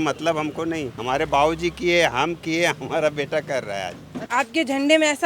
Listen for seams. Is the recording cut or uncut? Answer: cut